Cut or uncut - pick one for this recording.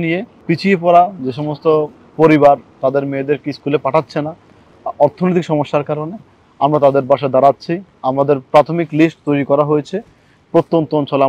uncut